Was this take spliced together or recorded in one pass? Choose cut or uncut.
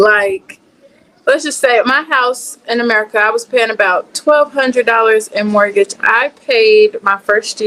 uncut